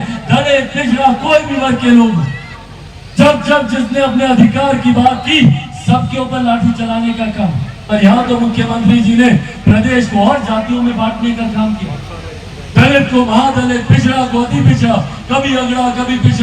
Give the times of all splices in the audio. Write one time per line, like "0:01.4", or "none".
0:07.7